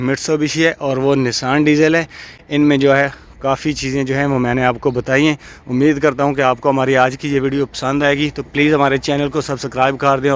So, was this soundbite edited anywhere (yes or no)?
no